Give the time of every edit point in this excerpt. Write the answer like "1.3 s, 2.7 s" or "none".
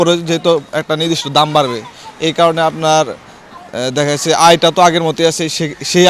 none